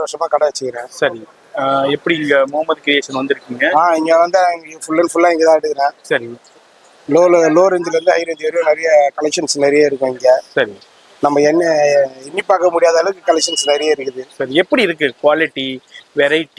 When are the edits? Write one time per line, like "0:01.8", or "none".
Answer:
none